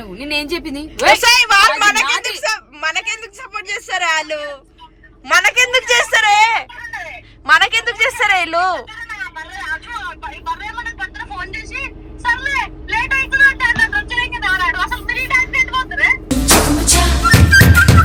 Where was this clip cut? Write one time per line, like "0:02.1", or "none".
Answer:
none